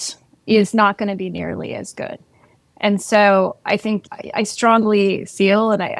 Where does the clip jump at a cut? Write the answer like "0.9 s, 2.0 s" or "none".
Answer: none